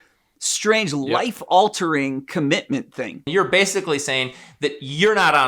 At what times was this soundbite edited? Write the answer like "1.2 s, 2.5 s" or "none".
3.3 s